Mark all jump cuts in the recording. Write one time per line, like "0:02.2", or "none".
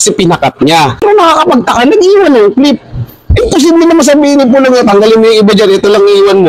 0:01.0